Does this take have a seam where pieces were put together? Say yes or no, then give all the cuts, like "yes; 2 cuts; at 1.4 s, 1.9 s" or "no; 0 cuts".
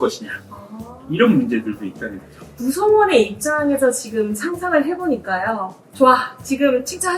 yes; 2 cuts; at 2.5 s, 5.8 s